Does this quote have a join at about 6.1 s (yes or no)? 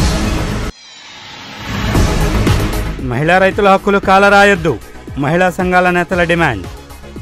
no